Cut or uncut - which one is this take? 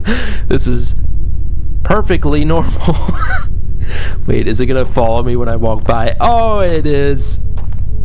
uncut